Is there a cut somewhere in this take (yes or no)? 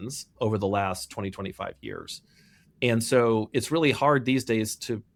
no